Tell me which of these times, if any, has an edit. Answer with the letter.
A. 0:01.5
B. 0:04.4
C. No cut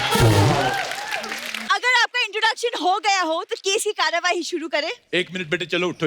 A